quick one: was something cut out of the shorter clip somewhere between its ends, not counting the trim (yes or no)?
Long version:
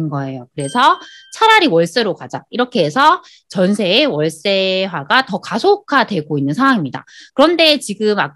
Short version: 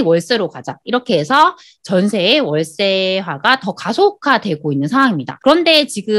yes